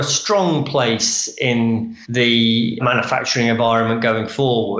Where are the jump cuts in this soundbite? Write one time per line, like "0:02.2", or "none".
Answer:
0:02.0
0:02.8